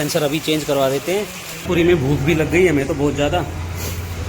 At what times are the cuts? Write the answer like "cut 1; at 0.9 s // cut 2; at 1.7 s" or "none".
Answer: cut 1; at 1.6 s